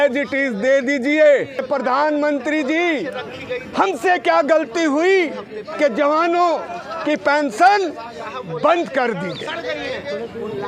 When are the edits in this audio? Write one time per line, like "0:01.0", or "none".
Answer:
0:01.6